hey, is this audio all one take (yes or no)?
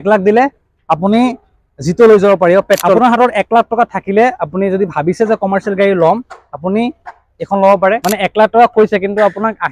no